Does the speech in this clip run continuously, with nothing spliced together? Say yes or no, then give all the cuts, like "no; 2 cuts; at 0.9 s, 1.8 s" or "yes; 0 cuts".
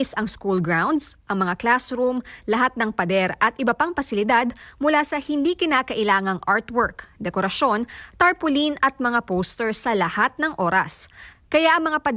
yes; 0 cuts